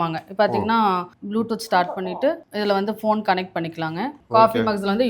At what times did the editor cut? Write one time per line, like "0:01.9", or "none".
0:04.1